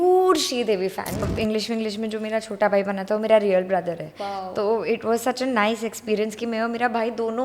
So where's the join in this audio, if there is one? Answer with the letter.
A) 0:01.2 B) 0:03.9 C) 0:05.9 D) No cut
A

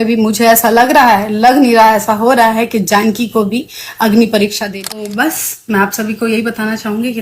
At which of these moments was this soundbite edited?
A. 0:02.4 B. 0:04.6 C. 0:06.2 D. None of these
B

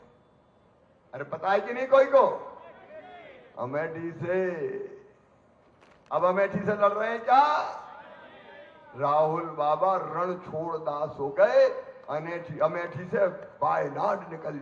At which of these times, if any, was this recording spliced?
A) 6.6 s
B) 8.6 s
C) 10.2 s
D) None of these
D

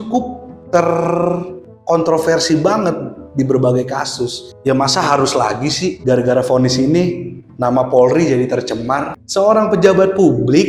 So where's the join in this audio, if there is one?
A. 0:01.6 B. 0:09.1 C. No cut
B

